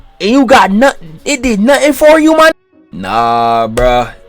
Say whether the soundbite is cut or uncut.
cut